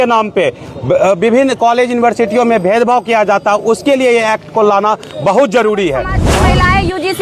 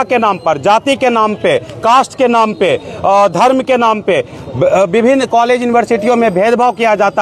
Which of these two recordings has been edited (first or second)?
first